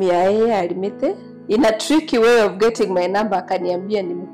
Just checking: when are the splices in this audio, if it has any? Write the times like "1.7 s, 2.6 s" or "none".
1.3 s